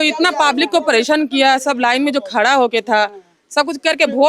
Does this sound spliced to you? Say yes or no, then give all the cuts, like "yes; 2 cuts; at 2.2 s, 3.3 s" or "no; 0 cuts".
no; 0 cuts